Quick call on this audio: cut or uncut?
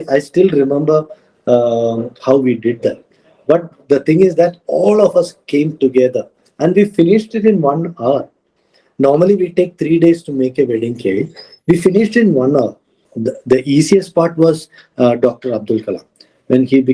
cut